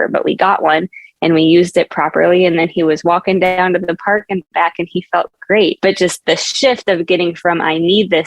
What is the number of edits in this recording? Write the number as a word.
one